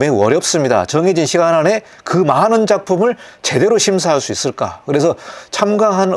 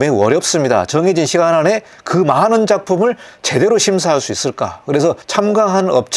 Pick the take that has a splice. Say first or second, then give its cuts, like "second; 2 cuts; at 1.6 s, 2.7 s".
second; 1 cut; at 5.2 s